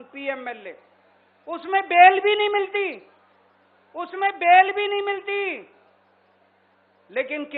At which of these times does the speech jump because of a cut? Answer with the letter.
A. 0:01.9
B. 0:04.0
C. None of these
C